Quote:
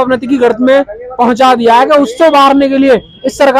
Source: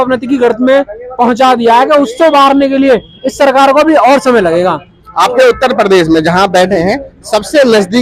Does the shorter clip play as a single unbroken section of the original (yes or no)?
yes